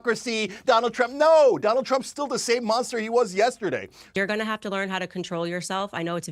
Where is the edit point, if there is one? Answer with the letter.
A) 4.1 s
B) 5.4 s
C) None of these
A